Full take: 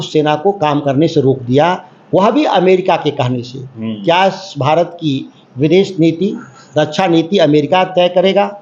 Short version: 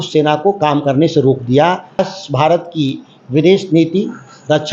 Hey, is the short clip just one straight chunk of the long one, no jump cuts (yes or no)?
no